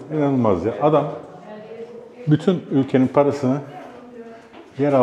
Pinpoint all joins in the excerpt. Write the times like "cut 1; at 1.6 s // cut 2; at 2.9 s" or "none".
none

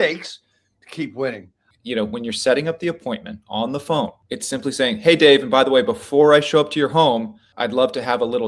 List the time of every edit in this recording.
cut 1; at 1.7 s // cut 2; at 4.2 s // cut 3; at 7.4 s

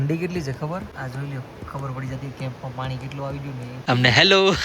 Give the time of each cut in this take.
cut 1; at 0.9 s // cut 2; at 3.7 s

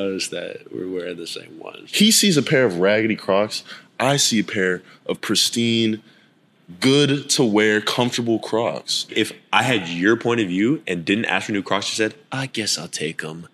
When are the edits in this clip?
cut 1; at 1.8 s // cut 2; at 9.1 s

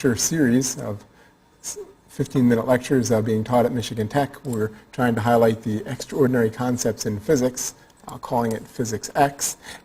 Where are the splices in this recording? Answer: cut 1; at 4.1 s

